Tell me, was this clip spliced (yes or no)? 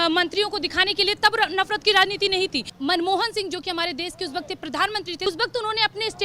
yes